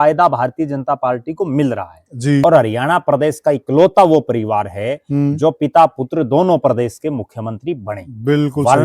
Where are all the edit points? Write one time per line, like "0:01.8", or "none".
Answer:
0:02.4